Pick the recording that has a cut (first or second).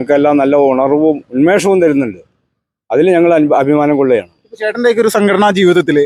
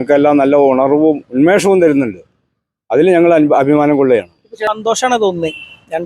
second